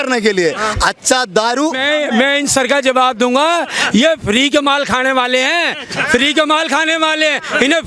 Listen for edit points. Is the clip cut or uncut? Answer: cut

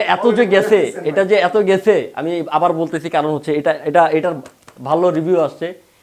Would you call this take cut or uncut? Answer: uncut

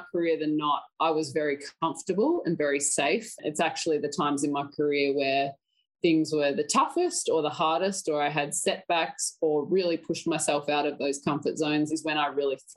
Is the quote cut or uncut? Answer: cut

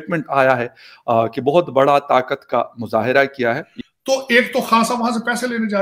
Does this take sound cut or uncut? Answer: cut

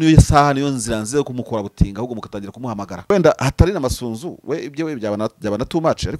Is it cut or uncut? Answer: cut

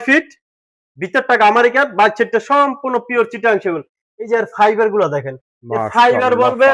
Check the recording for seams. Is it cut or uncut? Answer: uncut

